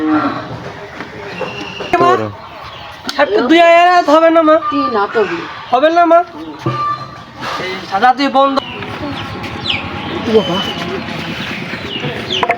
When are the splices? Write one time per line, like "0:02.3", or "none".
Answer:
0:01.9
0:08.6